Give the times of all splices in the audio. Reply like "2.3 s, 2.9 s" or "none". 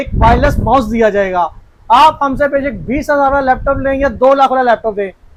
none